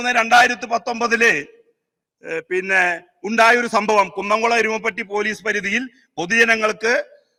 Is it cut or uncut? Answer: uncut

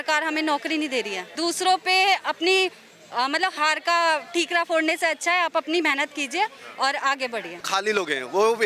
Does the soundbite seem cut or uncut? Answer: cut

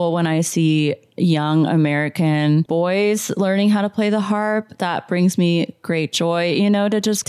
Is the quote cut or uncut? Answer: cut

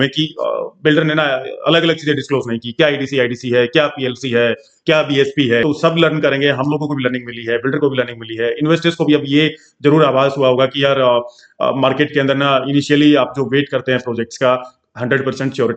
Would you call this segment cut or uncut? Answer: cut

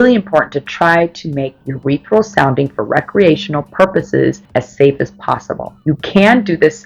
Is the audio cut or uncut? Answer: uncut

